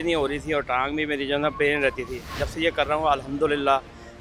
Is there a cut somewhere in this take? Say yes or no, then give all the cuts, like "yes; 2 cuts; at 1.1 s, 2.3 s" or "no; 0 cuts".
no; 0 cuts